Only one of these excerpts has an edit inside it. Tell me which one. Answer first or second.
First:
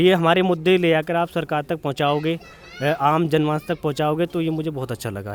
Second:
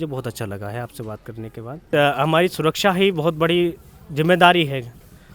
second